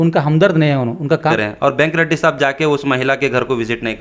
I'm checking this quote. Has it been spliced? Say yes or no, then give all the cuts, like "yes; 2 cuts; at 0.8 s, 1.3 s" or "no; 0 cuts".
yes; 1 cut; at 1.4 s